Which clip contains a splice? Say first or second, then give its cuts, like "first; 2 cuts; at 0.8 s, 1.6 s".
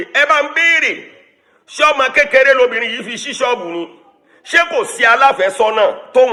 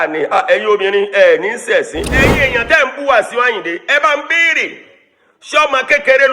second; 1 cut; at 2.1 s